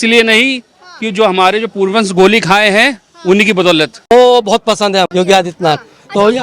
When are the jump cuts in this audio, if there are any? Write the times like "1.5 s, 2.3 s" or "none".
3.9 s, 5.1 s